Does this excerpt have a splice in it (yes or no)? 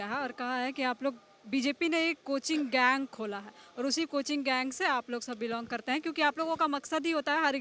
no